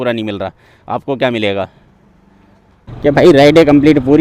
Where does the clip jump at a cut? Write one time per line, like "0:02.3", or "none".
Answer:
0:02.8

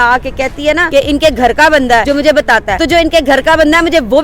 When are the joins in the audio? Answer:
0:00.9
0:02.3

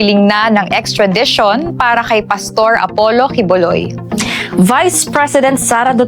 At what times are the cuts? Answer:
0:03.9

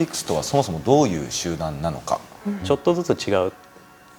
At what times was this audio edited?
0:02.6

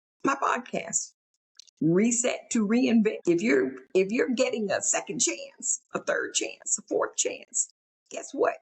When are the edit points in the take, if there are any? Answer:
0:03.2

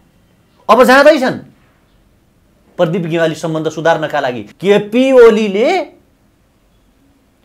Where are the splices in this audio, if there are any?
0:04.5

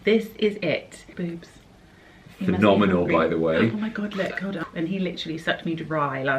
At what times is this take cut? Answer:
0:01.1
0:04.6

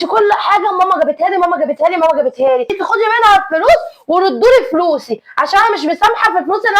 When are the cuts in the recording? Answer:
0:02.7

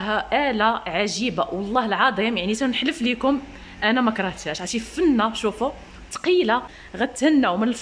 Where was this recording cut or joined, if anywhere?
0:06.7

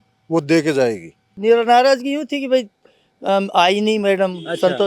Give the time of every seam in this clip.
0:01.3

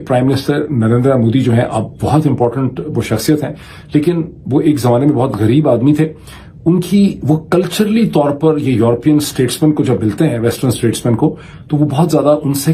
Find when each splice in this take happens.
none

